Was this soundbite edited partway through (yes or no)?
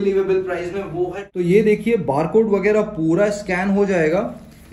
yes